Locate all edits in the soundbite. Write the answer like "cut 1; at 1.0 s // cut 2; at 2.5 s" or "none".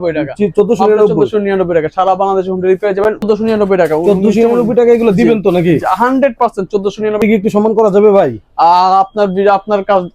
cut 1; at 3.2 s // cut 2; at 7.2 s